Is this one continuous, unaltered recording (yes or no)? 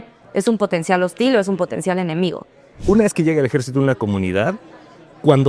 no